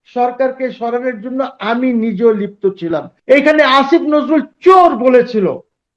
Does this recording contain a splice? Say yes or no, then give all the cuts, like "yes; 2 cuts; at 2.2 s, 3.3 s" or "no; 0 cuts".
yes; 1 cut; at 3.1 s